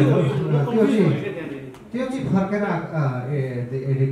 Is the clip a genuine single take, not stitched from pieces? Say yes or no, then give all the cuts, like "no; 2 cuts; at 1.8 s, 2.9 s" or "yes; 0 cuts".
yes; 0 cuts